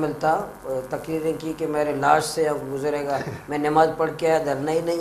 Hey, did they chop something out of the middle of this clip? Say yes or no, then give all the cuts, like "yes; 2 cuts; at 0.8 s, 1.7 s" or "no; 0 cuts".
no; 0 cuts